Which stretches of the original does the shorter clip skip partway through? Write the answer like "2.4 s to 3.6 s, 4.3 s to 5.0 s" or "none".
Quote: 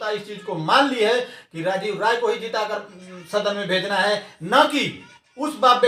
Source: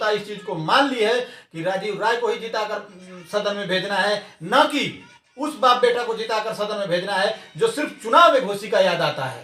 none